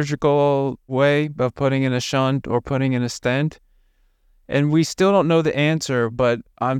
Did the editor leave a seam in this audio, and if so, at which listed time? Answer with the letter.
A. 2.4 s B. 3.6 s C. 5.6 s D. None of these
D